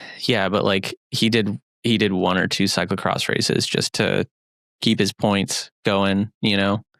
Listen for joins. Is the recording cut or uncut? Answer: uncut